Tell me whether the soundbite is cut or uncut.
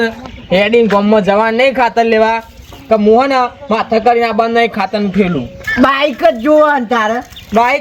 cut